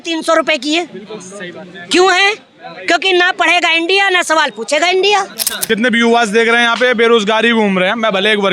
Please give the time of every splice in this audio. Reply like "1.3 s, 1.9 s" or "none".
5.6 s